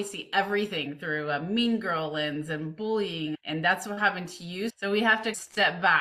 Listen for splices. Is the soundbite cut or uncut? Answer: cut